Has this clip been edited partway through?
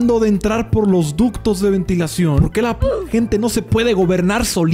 yes; 1 cut; at 2.5 s

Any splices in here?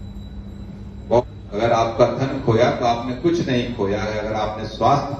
yes; 1 cut; at 1.2 s

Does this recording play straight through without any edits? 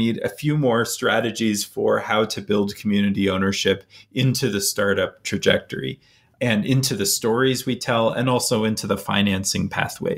yes; 0 cuts

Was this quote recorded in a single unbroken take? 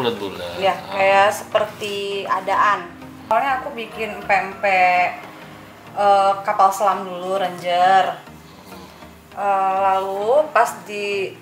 no; 1 cut; at 3.3 s

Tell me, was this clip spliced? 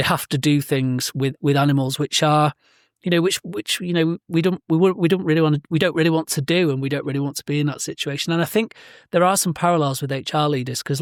no; 0 cuts

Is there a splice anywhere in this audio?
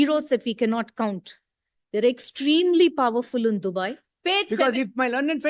yes; 1 cut; at 4.1 s

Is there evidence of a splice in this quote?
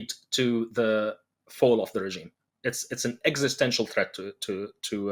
no; 0 cuts

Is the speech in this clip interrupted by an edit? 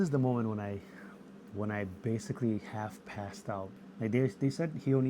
yes; 1 cut; at 3.7 s

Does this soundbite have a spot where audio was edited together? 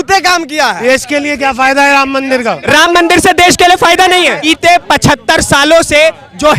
yes; 2 cuts; at 0.8 s, 4.4 s

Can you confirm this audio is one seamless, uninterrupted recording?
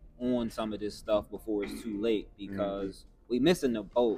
yes; 0 cuts

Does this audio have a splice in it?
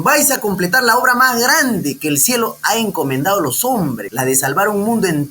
yes; 1 cut; at 4.1 s

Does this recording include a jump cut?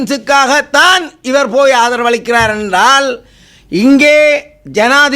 no; 0 cuts

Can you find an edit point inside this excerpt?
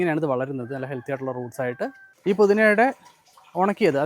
yes; 1 cut; at 2.2 s

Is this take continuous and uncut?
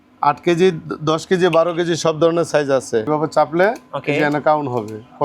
no; 1 cut; at 3.1 s

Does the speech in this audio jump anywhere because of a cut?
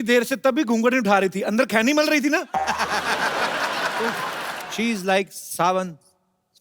yes; 1 cut; at 4.5 s

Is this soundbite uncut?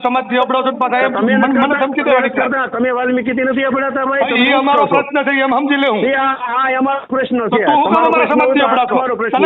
yes; 0 cuts

